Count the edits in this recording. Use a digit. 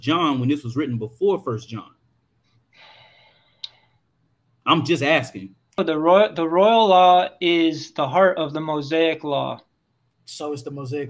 2